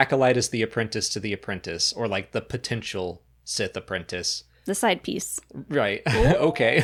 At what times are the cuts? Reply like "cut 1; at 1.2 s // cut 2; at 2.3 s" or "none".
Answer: none